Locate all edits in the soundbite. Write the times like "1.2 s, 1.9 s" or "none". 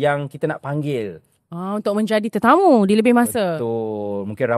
none

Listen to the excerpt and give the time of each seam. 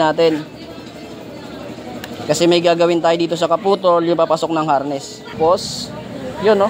5.4 s

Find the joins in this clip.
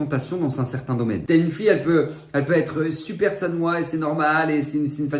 1.2 s

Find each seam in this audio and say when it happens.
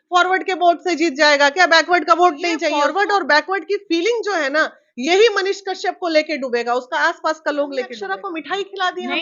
2.7 s, 8.0 s

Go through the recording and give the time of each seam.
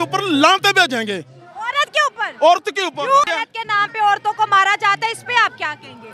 3.4 s

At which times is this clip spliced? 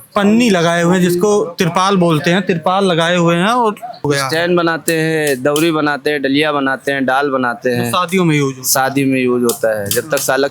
4.1 s

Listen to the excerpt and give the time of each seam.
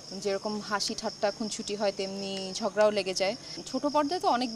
3.6 s

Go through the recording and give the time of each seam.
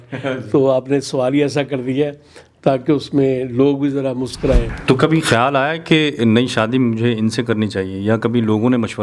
4.7 s

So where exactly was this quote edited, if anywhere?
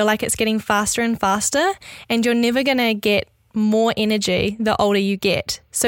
none

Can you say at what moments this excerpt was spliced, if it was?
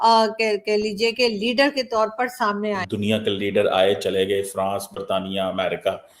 2.9 s

